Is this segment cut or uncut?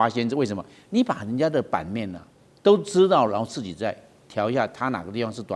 uncut